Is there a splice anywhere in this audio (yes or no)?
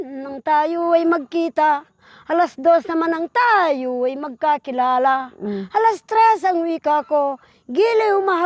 no